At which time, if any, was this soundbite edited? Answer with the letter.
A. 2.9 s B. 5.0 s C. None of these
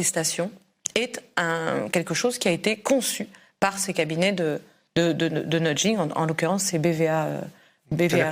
C